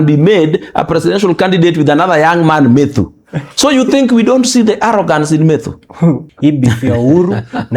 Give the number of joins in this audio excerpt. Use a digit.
1